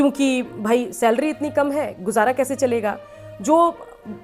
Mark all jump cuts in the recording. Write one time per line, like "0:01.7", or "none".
none